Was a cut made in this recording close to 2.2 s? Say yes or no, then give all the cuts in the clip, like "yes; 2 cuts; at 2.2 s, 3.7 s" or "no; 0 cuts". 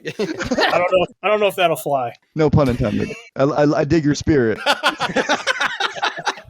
yes; 4 cuts; at 1.2 s, 2.2 s, 3.2 s, 4.6 s